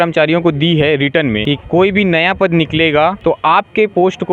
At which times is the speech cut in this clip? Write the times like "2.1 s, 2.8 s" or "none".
1.4 s, 3.2 s

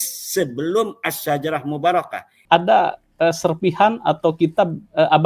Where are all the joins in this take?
2.3 s

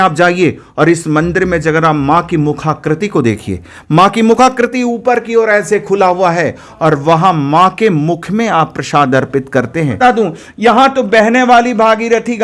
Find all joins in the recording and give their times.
10.0 s

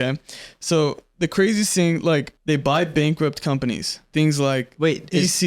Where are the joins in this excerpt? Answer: 2.3 s, 4.0 s

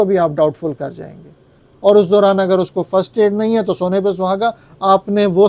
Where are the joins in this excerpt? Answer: none

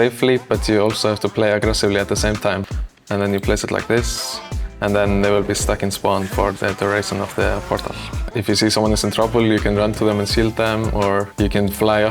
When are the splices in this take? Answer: 2.6 s, 8.3 s

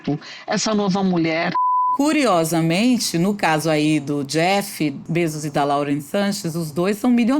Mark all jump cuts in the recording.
1.8 s, 5.0 s

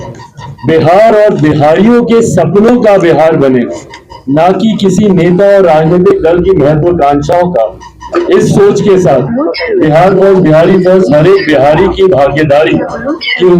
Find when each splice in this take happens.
none

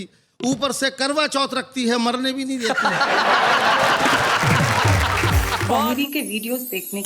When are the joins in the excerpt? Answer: 5.7 s

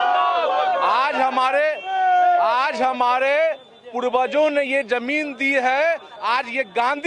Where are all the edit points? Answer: none

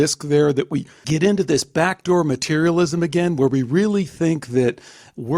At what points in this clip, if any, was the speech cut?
0.9 s

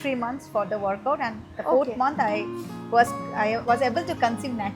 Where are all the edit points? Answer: none

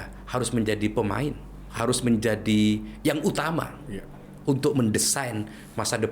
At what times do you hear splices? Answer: 1.7 s

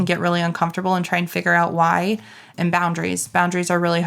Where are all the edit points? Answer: 2.5 s

